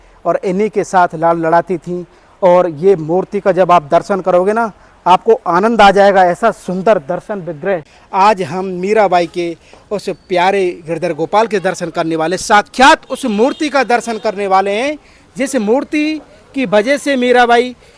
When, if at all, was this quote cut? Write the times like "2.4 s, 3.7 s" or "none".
8.0 s

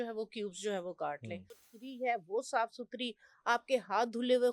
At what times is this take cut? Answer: 1.7 s

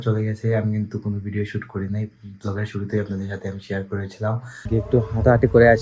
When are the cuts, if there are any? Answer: 4.5 s

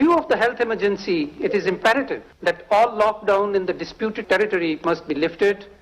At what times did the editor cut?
2.2 s, 4.2 s

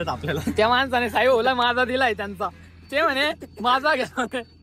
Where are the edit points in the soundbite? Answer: none

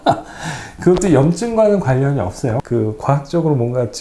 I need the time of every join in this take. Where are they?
2.7 s

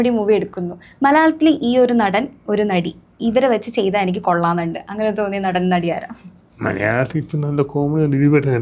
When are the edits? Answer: none

